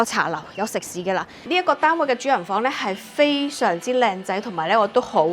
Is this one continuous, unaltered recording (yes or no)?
no